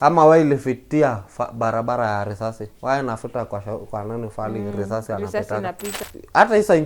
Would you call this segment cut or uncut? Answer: cut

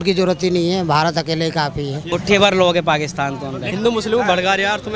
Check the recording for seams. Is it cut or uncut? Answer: cut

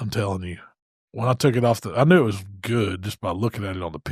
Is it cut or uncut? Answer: uncut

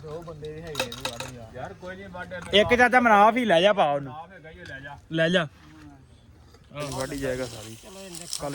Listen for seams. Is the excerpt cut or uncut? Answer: cut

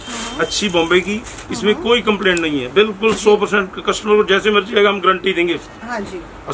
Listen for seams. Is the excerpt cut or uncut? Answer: uncut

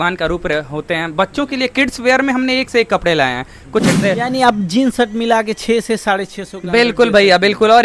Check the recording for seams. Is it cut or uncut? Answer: cut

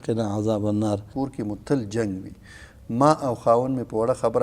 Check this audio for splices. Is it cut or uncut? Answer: cut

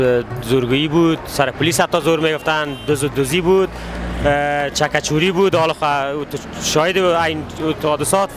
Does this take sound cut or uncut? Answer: uncut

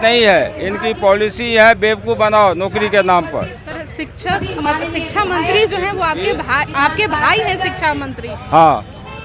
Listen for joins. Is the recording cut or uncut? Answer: uncut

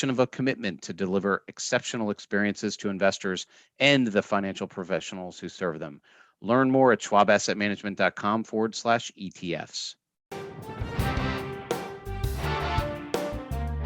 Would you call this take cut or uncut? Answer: cut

